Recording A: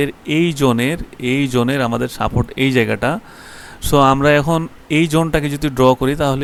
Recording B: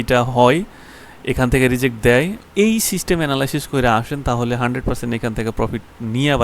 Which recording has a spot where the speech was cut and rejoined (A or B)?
B